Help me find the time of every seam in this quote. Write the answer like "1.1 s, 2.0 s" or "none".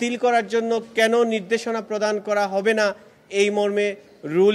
none